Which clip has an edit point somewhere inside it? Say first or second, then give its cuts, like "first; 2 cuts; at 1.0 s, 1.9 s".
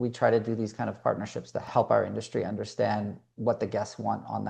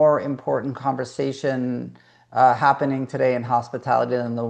first; 1 cut; at 1.6 s